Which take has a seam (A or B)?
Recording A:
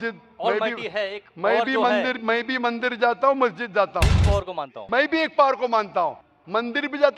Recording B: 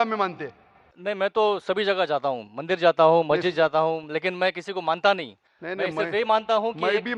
A